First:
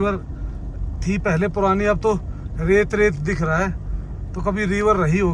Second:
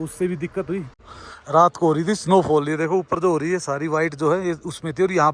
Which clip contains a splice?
second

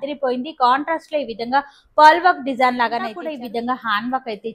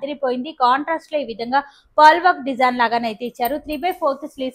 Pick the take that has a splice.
first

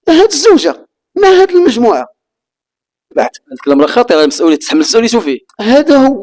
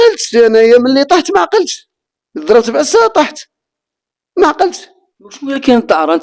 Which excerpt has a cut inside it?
first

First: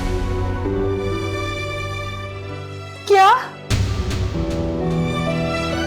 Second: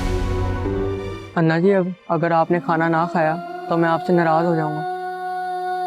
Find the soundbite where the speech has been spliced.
second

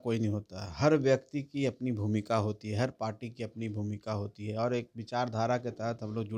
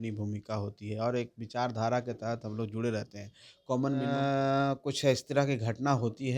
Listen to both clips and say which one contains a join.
second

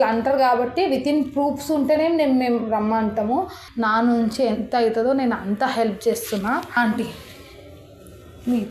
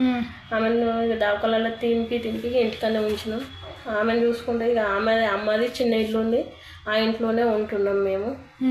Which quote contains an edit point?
first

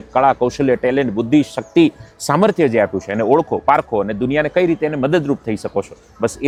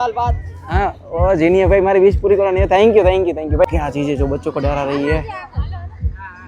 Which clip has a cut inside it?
second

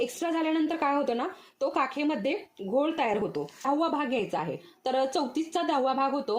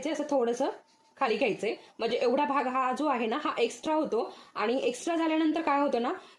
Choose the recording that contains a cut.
first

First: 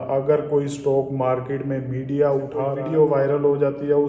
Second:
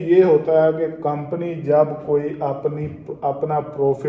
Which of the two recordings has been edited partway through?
first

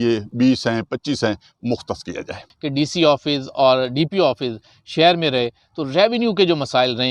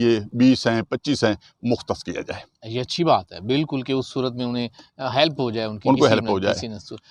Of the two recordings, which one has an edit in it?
first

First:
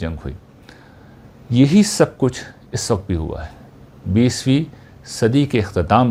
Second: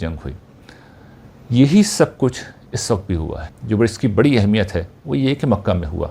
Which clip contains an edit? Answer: second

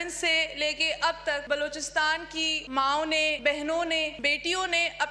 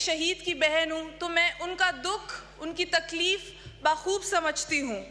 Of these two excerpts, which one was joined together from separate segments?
first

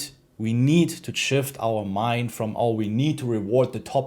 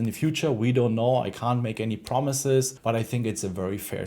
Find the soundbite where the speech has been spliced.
second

